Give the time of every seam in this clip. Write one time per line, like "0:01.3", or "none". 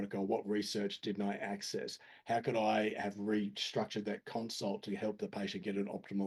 none